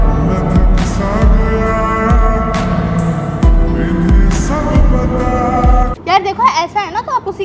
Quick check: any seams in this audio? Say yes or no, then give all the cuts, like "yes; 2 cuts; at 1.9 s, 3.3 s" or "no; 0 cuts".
yes; 1 cut; at 5.9 s